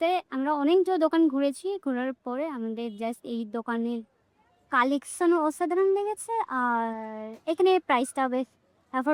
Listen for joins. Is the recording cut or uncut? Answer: uncut